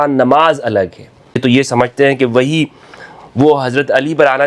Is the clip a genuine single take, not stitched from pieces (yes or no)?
no